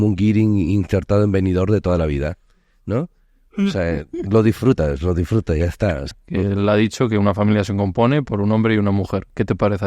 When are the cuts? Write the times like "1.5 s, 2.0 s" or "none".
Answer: 6.1 s

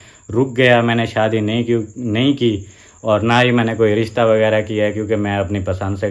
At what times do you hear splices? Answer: none

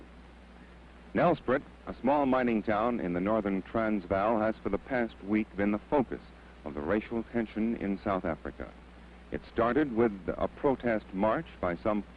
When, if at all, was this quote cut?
none

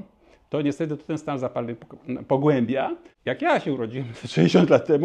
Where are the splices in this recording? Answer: 3.1 s

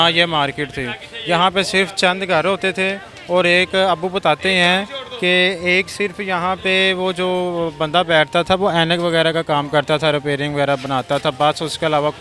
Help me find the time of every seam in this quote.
none

